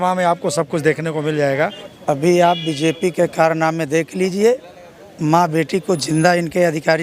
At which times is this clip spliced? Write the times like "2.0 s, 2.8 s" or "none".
1.9 s

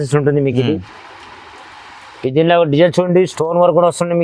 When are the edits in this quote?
none

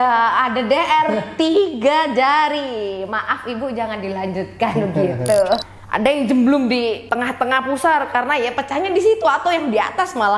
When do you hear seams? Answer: 5.7 s, 7.0 s

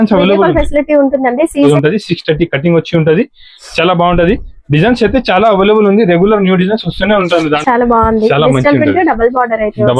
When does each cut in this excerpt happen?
1.7 s, 7.6 s

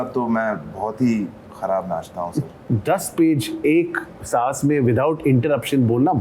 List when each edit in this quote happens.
2.6 s

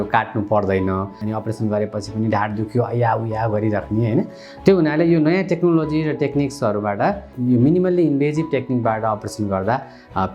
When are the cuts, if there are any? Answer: 1.2 s, 7.3 s

